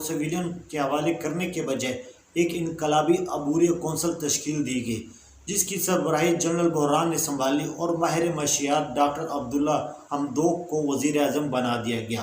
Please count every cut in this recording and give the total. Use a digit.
0